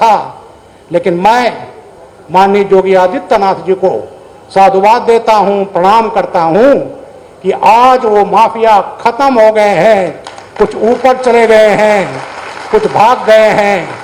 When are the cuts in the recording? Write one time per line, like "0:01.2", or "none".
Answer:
none